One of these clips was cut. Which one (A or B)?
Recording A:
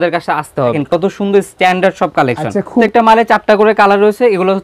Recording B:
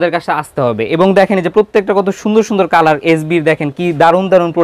A